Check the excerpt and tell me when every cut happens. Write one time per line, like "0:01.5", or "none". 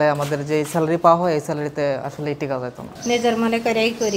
0:02.9